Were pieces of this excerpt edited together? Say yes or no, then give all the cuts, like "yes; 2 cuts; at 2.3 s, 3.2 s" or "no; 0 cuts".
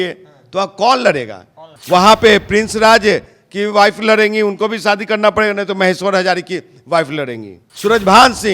yes; 2 cuts; at 1.7 s, 7.6 s